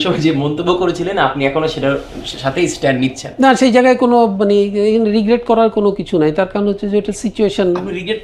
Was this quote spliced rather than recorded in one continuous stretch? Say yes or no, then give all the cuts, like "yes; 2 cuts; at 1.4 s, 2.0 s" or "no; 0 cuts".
no; 0 cuts